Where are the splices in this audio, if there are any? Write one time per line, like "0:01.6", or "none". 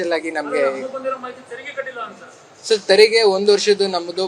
0:02.5